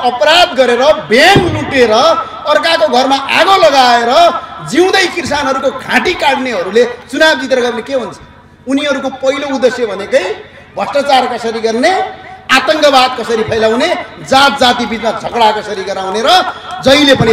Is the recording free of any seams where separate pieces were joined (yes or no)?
yes